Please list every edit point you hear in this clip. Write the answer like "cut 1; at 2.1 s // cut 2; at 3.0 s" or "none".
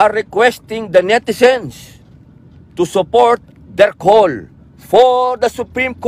none